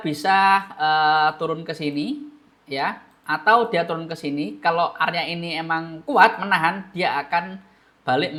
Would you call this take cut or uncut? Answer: uncut